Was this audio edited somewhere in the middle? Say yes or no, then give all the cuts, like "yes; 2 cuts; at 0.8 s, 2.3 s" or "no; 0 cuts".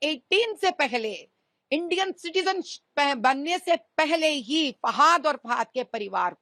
no; 0 cuts